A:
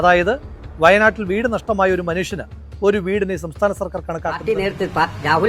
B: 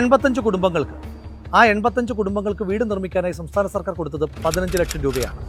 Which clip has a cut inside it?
A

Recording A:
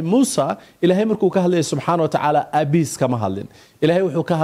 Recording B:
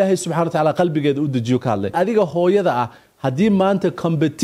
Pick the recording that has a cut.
B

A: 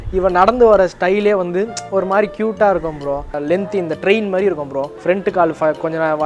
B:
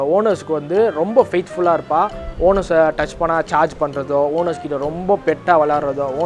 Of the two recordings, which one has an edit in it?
A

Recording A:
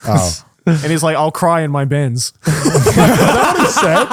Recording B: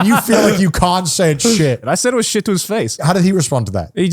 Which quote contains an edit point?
B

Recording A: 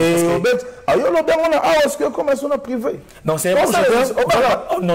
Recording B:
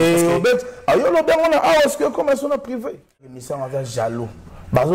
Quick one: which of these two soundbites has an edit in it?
B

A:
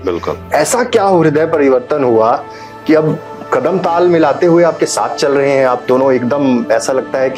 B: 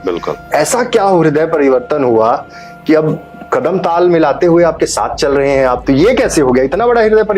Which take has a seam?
B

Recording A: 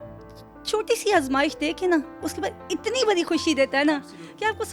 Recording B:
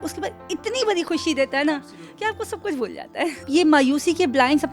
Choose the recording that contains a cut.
B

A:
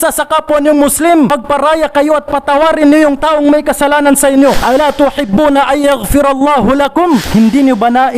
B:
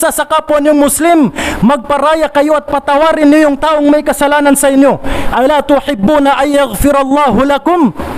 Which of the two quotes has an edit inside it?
A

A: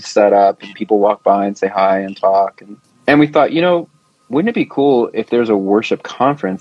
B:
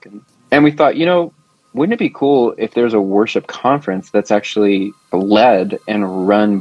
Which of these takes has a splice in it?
B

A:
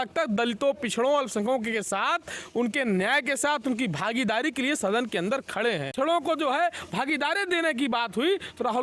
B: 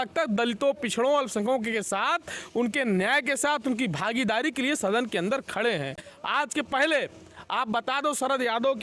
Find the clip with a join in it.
A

